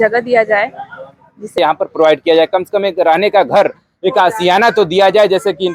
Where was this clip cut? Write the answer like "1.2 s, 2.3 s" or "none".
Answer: 1.6 s